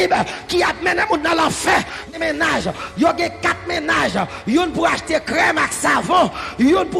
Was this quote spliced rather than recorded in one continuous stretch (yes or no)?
yes